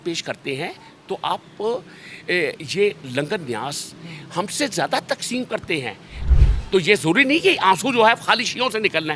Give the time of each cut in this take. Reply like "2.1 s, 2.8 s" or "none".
6.2 s